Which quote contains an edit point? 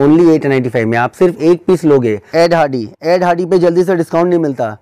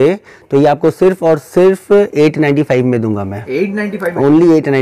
first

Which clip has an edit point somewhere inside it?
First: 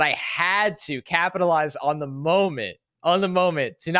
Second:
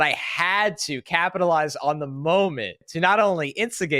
second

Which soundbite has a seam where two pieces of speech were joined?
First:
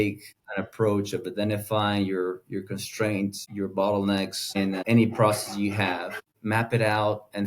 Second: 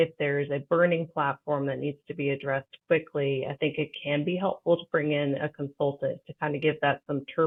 first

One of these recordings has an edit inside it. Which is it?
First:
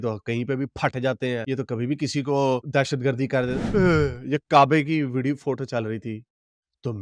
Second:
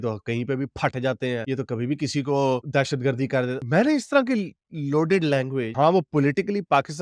first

